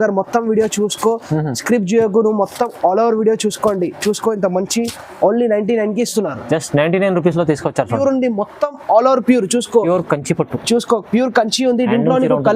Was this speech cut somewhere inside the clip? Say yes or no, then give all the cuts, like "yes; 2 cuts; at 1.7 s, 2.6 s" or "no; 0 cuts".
yes; 1 cut; at 8.0 s